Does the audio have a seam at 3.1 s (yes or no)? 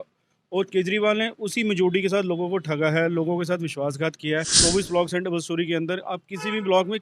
no